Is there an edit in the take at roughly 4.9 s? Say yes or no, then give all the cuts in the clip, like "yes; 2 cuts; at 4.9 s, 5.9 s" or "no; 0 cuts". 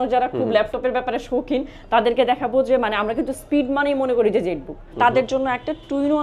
yes; 1 cut; at 4.9 s